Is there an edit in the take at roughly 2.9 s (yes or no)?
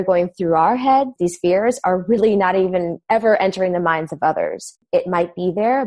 yes